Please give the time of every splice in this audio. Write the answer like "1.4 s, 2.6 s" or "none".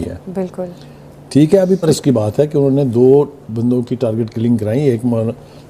1.8 s

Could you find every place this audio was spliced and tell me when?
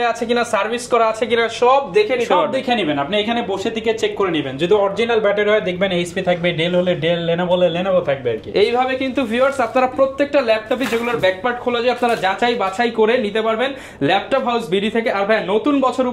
none

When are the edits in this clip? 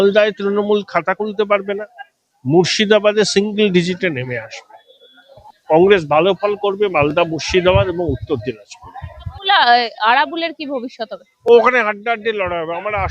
5.3 s, 9.3 s

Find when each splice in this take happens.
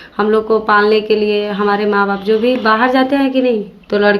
none

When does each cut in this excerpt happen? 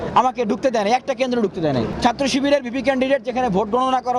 1.9 s

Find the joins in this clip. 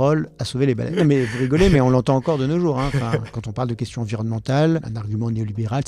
0.9 s, 3.4 s, 5.0 s

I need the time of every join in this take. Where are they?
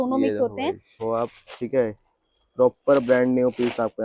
0.9 s

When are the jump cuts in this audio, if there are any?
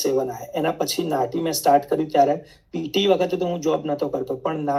none

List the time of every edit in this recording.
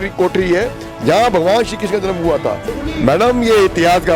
2.7 s

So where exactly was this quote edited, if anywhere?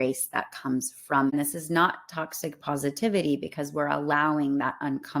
1.3 s

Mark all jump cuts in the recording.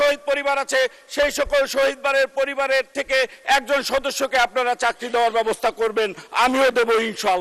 none

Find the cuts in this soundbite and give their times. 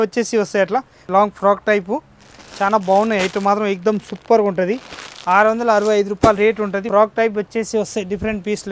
1.0 s, 6.9 s

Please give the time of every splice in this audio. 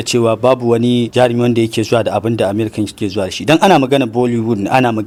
none

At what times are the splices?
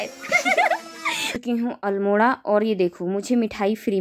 1.3 s

